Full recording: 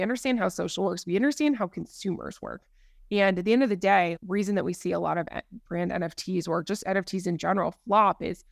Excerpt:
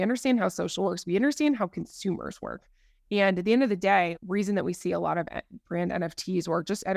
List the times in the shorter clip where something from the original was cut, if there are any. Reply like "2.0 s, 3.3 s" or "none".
none